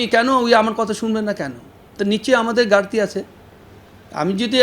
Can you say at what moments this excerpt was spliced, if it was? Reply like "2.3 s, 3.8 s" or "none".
none